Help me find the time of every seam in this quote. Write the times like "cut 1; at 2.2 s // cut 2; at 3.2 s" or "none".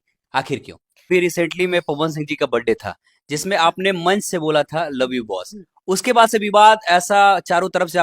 cut 1; at 1.1 s